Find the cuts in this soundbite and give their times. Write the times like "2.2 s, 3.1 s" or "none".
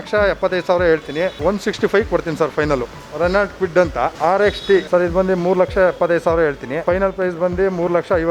3.0 s, 4.1 s, 4.9 s, 6.8 s